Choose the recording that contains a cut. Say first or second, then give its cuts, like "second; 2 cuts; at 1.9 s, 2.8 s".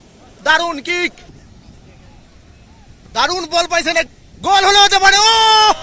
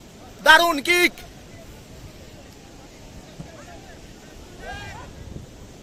first; 2 cuts; at 1.3 s, 4.1 s